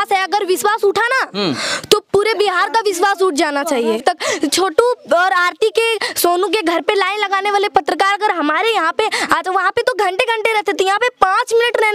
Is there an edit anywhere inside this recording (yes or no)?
yes